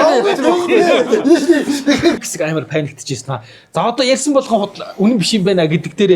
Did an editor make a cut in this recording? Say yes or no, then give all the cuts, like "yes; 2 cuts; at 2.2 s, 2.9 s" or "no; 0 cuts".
yes; 1 cut; at 2.2 s